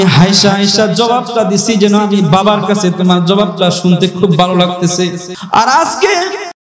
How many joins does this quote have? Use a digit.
1